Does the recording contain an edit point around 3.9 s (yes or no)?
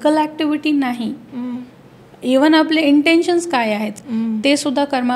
yes